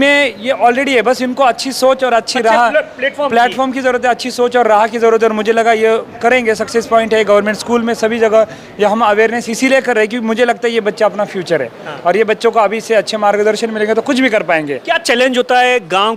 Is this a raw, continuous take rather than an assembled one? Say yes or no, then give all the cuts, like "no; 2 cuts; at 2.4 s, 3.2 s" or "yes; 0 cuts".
yes; 0 cuts